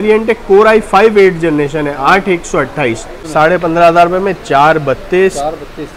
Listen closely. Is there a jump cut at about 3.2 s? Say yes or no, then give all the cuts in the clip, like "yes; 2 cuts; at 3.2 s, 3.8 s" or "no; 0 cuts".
yes; 1 cut; at 3.2 s